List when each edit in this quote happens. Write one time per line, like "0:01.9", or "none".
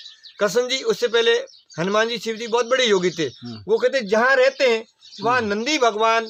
none